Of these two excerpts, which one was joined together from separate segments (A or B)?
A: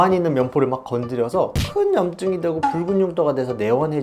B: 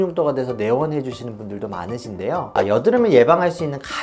B